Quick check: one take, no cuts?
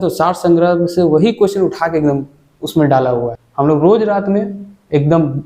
no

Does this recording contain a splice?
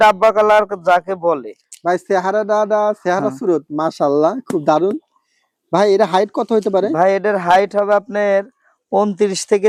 no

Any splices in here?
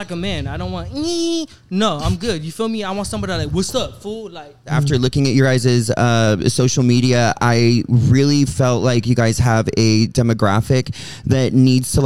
yes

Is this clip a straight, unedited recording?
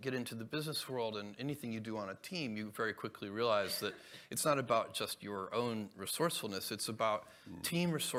yes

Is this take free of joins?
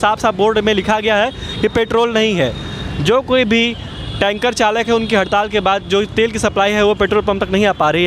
yes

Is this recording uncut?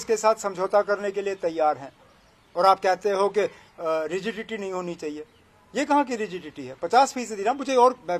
yes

